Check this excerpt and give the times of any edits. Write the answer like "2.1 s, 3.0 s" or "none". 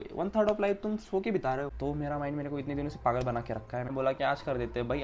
1.7 s, 3.9 s